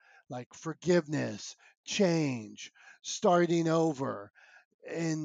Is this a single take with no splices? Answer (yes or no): yes